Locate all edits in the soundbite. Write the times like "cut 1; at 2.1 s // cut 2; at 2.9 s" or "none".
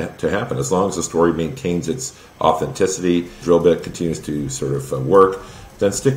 cut 1; at 3.4 s